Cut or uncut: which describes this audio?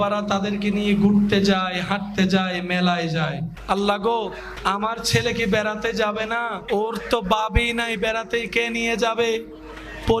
cut